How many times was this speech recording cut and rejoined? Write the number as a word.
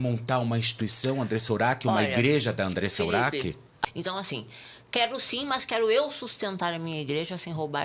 one